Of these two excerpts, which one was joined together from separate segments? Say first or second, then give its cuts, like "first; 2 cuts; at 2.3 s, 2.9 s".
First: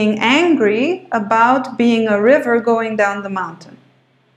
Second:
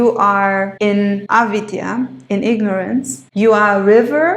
second; 2 cuts; at 1.0 s, 3.2 s